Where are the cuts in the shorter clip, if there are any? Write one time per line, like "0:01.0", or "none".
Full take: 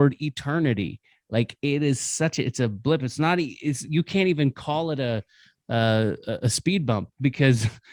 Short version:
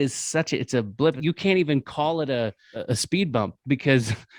0:01.2
0:02.7

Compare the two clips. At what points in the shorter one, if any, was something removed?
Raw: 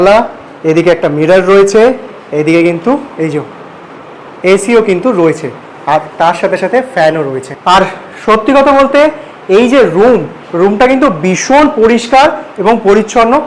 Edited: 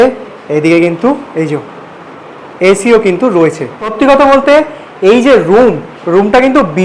0:03.9

